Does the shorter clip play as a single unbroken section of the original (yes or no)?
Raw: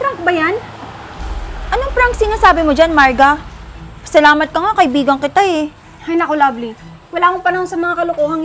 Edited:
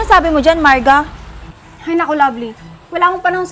no